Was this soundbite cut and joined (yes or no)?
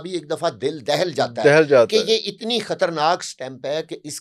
no